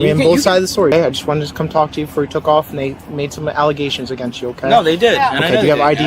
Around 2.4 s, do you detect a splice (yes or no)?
no